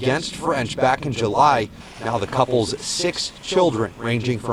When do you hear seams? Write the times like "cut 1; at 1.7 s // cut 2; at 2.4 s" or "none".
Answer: none